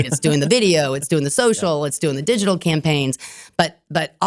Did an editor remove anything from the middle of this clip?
no; 0 cuts

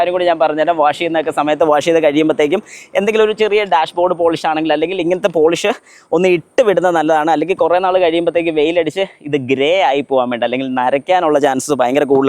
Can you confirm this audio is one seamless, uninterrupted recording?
yes; 0 cuts

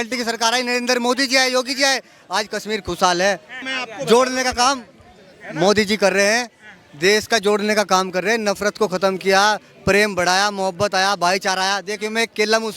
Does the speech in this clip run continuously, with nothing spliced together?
no; 1 cut; at 3.6 s

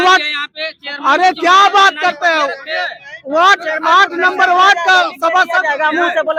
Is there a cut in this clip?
no; 0 cuts

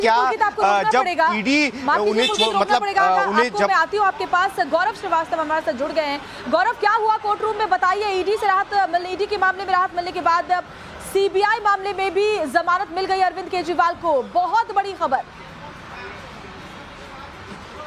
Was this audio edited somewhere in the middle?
no; 0 cuts

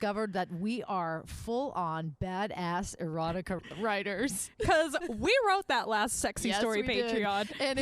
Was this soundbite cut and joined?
yes; 1 cut; at 3.6 s

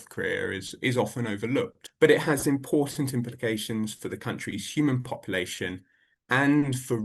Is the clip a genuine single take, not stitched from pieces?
no; 1 cut; at 1.8 s

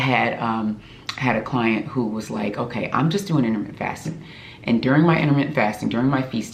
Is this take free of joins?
yes; 0 cuts

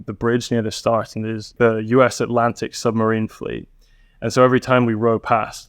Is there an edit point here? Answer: yes; 1 cut; at 1.5 s

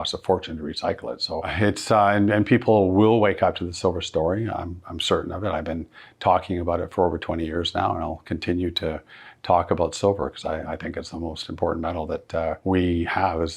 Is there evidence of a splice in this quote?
yes; 2 cuts; at 1.5 s, 12.6 s

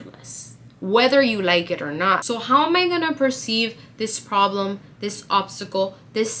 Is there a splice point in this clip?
yes; 1 cut; at 2.2 s

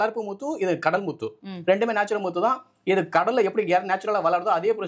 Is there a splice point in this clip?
no; 0 cuts

